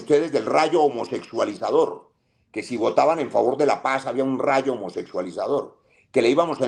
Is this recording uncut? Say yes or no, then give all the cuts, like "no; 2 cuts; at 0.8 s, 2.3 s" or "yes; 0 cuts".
yes; 0 cuts